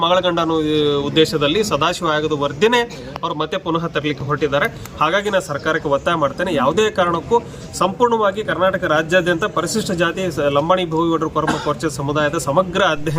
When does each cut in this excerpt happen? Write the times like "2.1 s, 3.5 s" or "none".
none